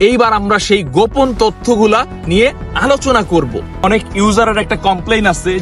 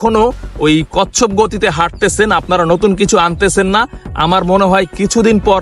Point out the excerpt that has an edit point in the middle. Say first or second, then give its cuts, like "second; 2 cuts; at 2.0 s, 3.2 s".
first; 1 cut; at 3.8 s